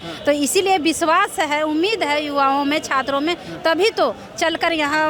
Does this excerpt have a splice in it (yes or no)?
no